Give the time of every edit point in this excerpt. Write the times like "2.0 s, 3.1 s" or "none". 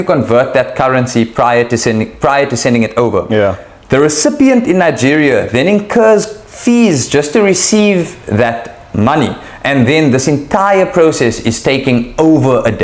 none